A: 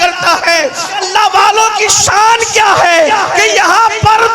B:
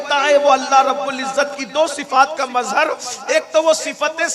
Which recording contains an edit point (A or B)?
A